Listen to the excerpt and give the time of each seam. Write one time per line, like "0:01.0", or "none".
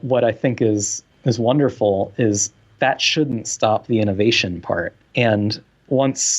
0:05.0